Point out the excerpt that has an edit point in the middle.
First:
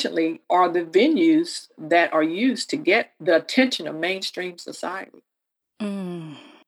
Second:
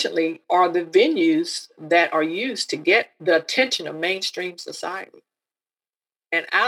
second; 1 cut; at 5.7 s

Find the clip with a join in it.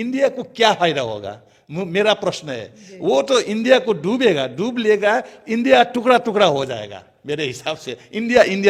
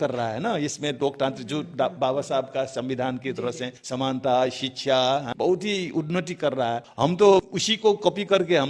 second; 4 cuts; at 3.7 s, 5.3 s, 6.9 s, 7.6 s

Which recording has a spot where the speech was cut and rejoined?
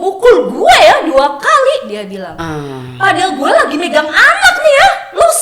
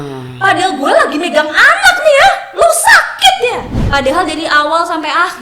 second; 1 cut; at 3.7 s

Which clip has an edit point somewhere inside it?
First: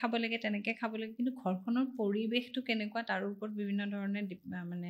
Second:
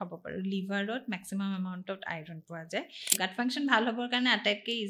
second; 1 cut; at 3.1 s

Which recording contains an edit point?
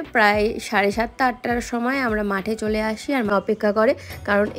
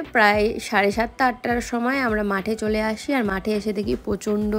first; 1 cut; at 3.3 s

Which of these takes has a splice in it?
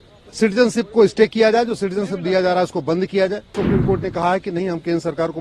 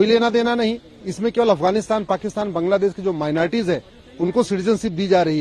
first; 1 cut; at 3.6 s

